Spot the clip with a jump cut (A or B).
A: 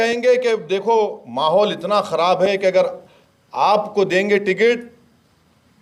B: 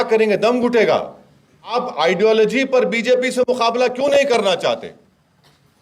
B